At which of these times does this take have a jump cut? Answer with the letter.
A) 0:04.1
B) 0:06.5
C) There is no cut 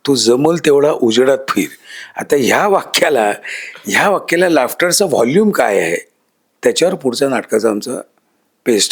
C